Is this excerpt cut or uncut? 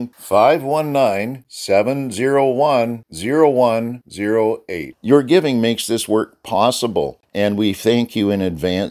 cut